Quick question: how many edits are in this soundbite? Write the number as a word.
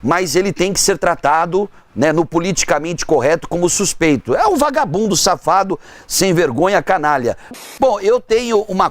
one